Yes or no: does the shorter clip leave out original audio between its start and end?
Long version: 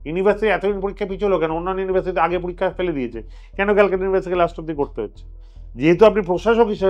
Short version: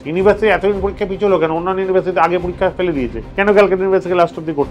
yes